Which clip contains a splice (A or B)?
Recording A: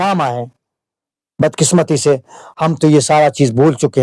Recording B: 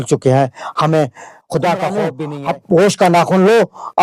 B